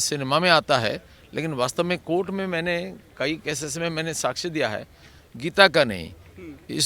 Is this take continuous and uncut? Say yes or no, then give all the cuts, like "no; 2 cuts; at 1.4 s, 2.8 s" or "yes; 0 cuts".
yes; 0 cuts